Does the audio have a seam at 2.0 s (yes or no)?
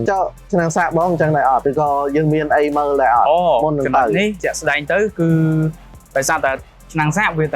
no